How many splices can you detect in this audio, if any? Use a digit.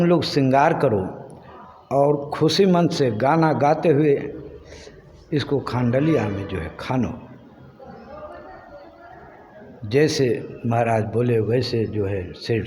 0